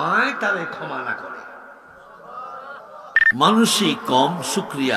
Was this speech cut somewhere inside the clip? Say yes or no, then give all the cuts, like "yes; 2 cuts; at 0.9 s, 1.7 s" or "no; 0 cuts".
yes; 1 cut; at 3.1 s